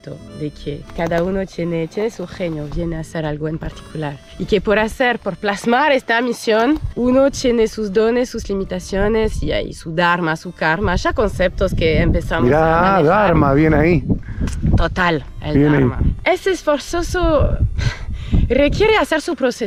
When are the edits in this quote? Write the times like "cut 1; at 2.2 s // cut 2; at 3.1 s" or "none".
none